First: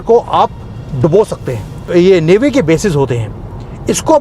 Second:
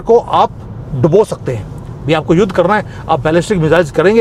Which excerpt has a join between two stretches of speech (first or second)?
first